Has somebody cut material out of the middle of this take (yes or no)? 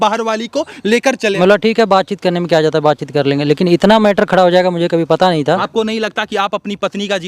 yes